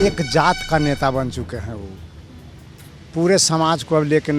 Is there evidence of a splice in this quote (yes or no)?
no